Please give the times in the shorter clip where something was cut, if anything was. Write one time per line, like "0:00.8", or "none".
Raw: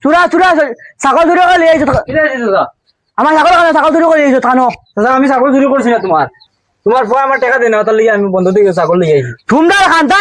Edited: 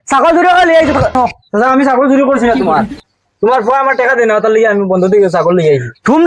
0:01.2